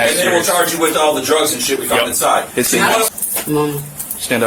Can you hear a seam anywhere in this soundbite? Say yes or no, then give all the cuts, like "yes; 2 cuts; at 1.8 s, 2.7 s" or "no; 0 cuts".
yes; 1 cut; at 3.1 s